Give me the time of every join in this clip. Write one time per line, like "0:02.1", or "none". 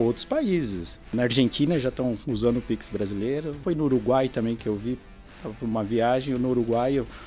0:01.0
0:03.5